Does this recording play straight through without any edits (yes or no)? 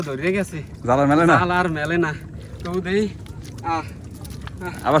yes